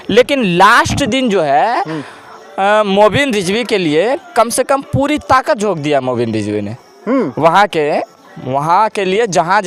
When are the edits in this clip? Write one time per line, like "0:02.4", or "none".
none